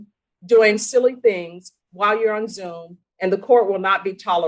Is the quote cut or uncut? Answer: uncut